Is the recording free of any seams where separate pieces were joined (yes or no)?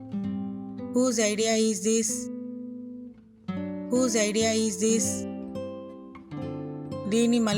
no